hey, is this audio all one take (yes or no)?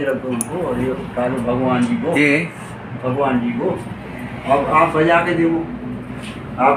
yes